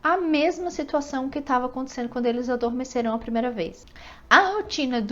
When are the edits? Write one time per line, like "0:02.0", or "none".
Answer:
0:03.8